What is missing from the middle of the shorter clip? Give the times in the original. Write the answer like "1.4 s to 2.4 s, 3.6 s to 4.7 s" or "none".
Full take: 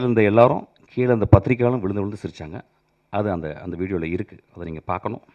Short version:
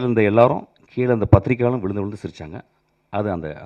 none